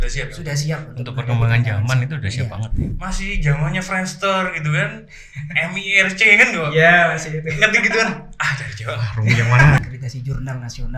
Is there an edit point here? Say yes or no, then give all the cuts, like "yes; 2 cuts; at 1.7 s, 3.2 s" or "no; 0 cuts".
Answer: yes; 2 cuts; at 2.8 s, 9.8 s